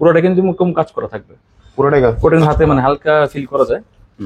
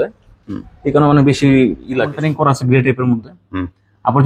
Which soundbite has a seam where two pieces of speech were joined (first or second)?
second